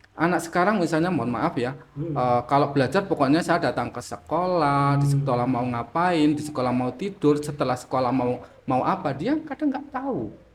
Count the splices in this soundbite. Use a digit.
0